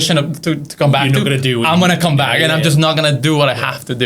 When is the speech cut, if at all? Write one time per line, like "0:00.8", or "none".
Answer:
none